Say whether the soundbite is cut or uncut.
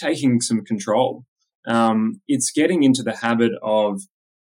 uncut